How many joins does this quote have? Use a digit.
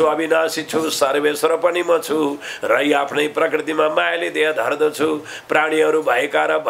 0